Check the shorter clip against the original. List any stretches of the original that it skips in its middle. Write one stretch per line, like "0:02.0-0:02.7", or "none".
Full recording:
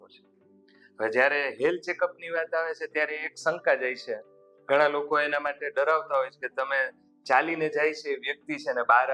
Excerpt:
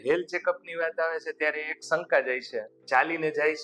0:04.2-0:07.1